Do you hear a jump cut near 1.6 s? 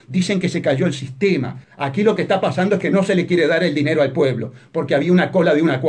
yes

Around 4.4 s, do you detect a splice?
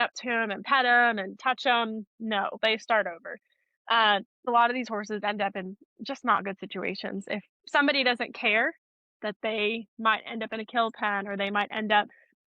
yes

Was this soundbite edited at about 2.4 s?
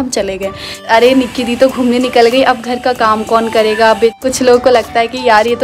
no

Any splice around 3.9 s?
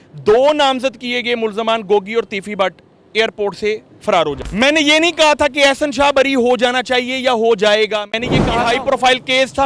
yes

